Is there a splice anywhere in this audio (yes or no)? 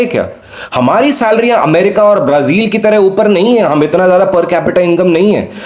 no